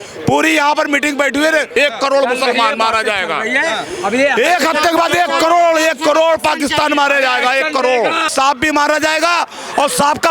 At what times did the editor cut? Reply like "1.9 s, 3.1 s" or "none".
1.7 s, 8.3 s